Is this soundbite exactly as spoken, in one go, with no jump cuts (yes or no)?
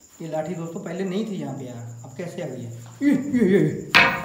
yes